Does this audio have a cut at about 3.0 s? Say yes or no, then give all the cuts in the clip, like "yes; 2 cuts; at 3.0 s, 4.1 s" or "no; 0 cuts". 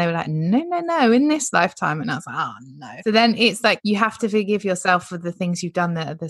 yes; 2 cuts; at 3.0 s, 3.8 s